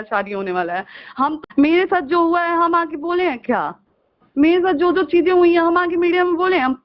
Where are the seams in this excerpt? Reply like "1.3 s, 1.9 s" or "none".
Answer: 1.4 s